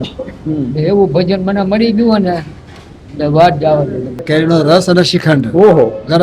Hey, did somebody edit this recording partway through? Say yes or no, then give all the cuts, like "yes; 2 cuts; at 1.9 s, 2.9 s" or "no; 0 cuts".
yes; 1 cut; at 4.2 s